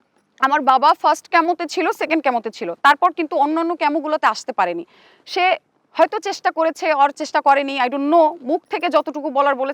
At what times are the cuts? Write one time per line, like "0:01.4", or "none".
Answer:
none